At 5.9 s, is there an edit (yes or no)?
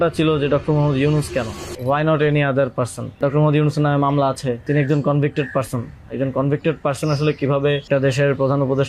no